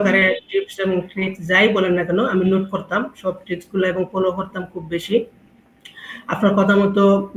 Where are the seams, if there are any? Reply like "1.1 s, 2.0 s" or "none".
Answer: none